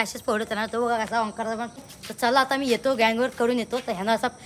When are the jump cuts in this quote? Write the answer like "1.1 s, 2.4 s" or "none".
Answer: 1.8 s